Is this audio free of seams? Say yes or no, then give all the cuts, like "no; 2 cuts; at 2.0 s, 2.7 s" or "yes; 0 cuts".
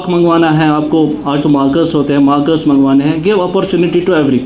yes; 0 cuts